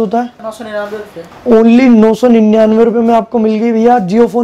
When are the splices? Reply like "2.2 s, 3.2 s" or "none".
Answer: none